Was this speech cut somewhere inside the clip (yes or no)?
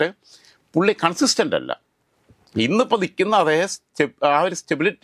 no